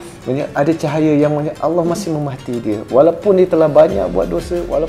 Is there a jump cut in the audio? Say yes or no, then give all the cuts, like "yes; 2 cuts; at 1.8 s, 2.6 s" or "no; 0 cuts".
no; 0 cuts